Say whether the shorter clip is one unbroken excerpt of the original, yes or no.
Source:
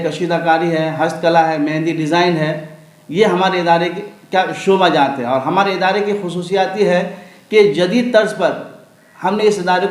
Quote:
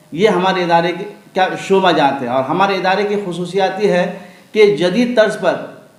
yes